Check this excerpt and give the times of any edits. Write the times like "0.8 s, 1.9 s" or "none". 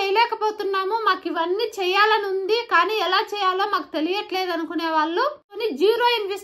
5.5 s